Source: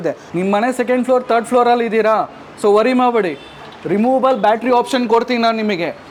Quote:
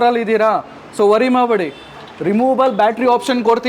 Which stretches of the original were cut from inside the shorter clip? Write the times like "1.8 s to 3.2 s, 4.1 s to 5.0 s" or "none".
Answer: none